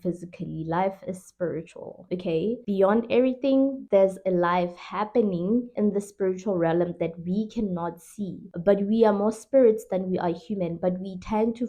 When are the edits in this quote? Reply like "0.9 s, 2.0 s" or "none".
none